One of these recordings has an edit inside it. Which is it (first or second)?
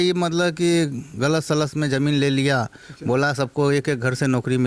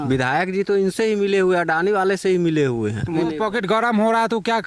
second